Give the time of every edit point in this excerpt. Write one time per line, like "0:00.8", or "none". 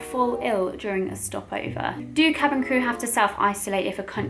0:02.2

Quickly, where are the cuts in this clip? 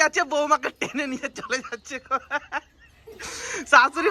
none

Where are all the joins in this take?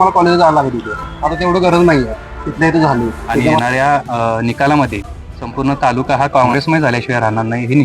0:03.6
0:06.5

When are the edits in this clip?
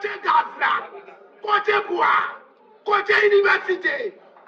none

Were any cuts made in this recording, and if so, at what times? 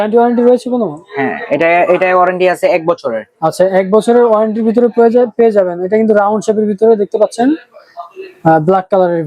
none

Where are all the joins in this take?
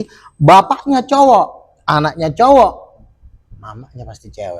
none

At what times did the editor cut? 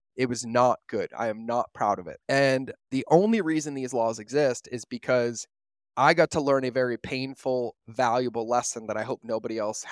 0:02.1
0:02.9

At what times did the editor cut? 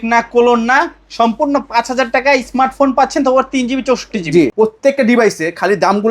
0:04.5

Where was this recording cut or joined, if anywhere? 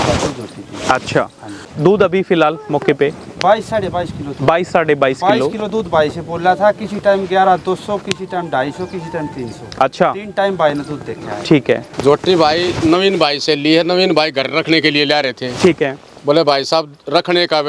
0:01.7
0:11.9

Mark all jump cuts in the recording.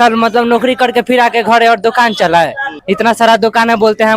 0:02.7

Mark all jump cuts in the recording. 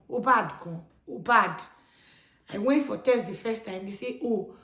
none

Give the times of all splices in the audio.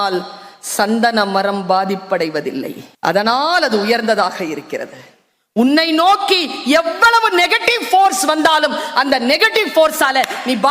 0:02.8

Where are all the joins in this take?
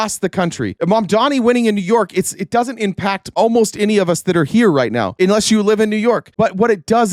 none

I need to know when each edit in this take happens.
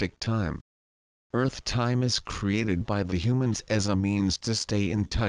0:02.3

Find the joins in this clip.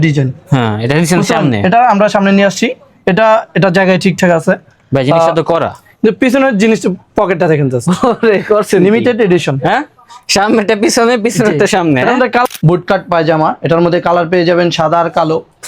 0:12.5

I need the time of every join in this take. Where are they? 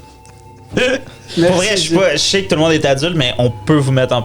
0:01.2

